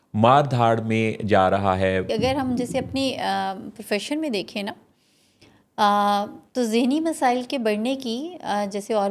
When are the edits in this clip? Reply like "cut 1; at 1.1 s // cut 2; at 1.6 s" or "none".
cut 1; at 2.1 s